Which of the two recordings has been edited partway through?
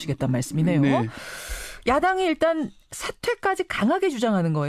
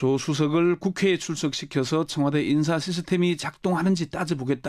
first; 1 cut; at 3.0 s

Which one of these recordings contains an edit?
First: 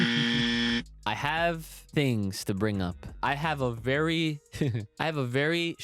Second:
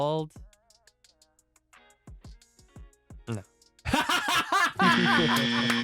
first; 4 cuts; at 0.9 s, 1.7 s, 3.1 s, 4.9 s

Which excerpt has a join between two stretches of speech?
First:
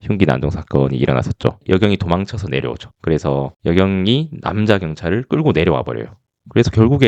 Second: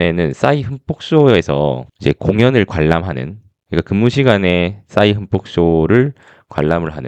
first; 1 cut; at 1.6 s

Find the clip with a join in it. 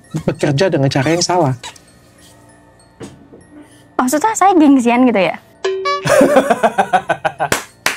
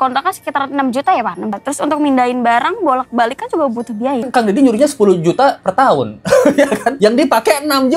second; 3 cuts; at 1.6 s, 4.3 s, 6.9 s

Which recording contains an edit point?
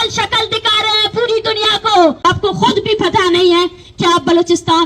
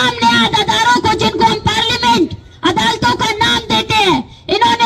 first; 1 cut; at 2.2 s

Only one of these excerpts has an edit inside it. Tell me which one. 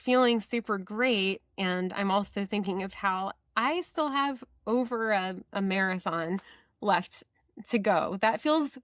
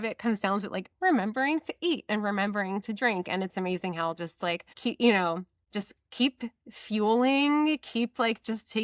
second; 2 cuts; at 4.7 s, 5.6 s

